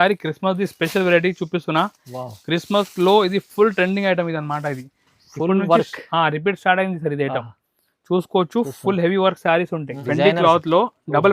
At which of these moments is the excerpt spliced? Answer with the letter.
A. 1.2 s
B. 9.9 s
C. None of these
B